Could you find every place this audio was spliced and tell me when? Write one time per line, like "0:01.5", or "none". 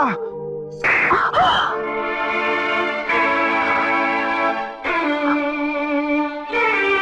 none

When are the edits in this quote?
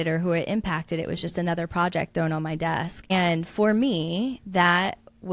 0:03.1

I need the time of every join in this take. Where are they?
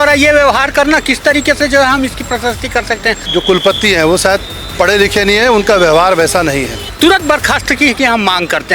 0:03.2
0:06.9

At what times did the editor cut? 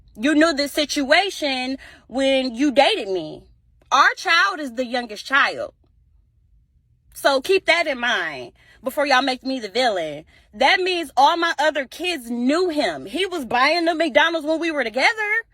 0:07.2

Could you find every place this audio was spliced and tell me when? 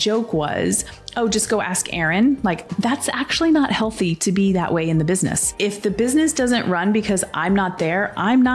0:02.7
0:05.5

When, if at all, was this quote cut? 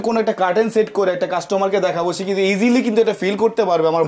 none

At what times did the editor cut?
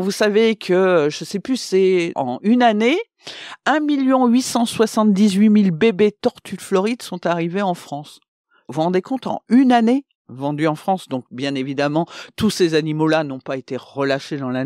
0:10.2

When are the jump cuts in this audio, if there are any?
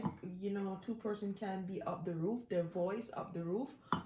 none

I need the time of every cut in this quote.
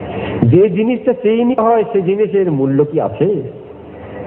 0:01.6

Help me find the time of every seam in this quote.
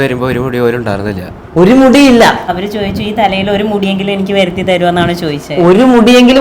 0:02.5

